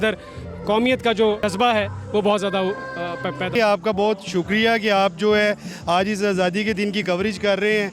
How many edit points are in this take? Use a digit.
1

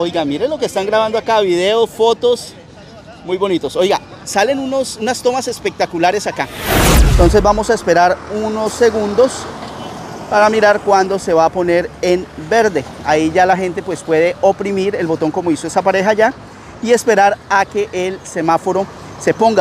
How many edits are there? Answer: 1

